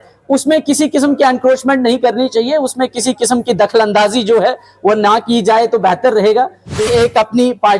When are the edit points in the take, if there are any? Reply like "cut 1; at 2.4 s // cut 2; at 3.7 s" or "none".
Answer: cut 1; at 6.9 s